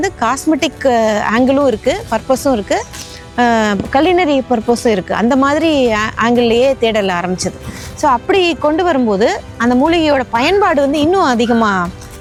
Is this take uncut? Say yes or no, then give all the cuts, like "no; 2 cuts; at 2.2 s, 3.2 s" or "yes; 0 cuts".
yes; 0 cuts